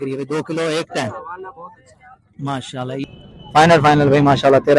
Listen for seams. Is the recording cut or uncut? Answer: cut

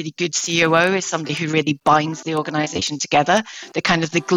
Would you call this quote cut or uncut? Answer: uncut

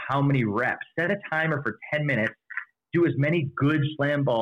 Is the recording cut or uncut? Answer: uncut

